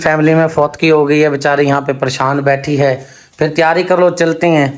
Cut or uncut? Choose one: uncut